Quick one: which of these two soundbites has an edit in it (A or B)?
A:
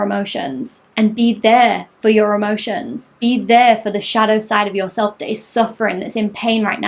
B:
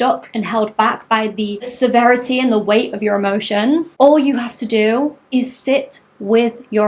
B